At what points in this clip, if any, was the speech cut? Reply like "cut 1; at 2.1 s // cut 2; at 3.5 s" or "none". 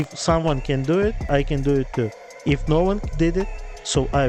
none